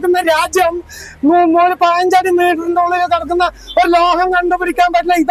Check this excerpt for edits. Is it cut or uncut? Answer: uncut